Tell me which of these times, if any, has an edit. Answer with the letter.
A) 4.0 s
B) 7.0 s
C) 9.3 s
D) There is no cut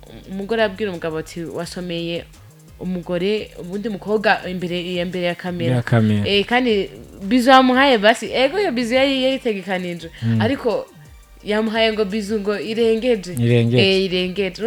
D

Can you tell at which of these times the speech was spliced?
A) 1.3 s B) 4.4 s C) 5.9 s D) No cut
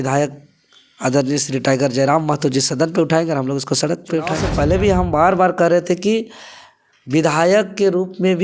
B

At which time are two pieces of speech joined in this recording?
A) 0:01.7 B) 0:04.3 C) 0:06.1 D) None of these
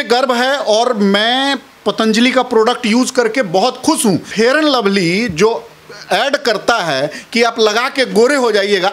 B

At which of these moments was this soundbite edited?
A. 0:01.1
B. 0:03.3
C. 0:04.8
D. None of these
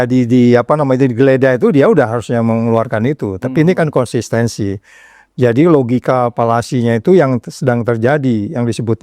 D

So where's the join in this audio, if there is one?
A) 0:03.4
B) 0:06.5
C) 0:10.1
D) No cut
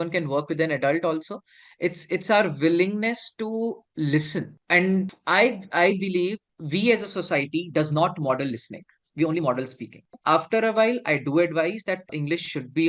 C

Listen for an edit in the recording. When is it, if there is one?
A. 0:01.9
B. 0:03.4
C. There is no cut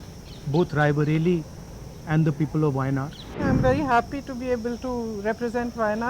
B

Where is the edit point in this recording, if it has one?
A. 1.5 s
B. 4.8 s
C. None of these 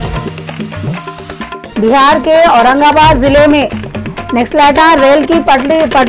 C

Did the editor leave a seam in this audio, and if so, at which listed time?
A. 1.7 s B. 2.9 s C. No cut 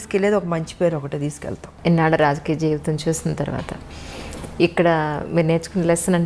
A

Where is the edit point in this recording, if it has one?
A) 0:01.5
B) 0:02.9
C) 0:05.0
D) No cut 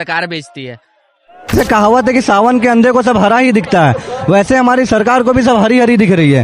A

